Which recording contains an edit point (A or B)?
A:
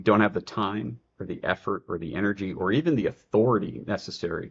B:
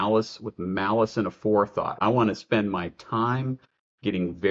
B